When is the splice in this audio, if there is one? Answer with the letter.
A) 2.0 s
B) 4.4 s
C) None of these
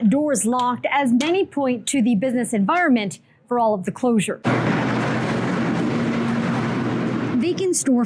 C